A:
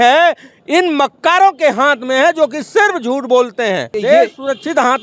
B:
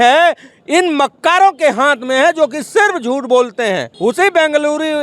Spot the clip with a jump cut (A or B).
B